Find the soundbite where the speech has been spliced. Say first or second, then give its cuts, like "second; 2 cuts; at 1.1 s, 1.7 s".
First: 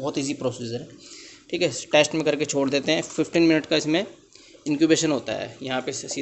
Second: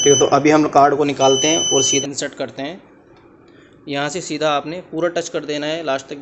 second; 1 cut; at 2.0 s